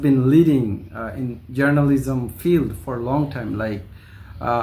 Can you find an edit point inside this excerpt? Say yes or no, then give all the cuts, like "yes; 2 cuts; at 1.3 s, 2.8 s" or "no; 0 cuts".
no; 0 cuts